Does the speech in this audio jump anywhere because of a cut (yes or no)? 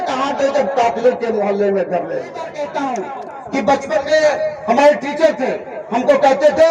yes